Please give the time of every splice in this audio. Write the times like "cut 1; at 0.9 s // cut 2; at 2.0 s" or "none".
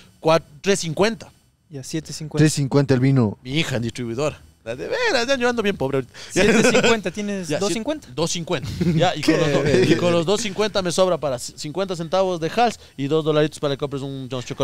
none